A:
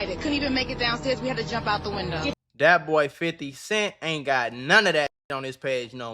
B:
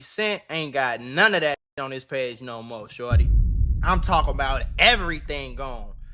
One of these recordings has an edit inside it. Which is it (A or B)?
A